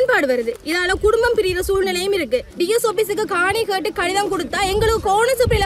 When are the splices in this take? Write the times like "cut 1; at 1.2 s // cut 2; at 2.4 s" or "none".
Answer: cut 1; at 2.5 s

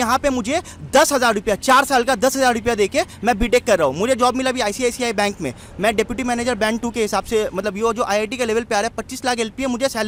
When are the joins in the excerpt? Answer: none

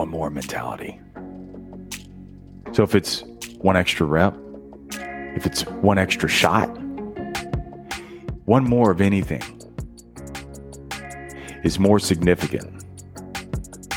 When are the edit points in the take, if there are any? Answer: cut 1; at 1.1 s // cut 2; at 2.8 s // cut 3; at 9.4 s // cut 4; at 11.1 s

